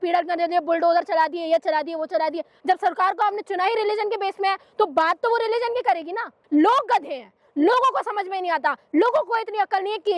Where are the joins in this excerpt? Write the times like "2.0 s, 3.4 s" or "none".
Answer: 2.5 s, 6.4 s